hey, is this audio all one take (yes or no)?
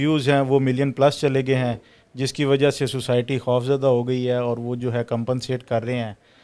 yes